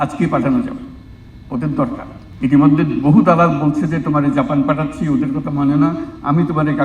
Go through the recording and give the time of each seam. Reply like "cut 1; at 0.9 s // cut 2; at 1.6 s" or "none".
cut 1; at 2.2 s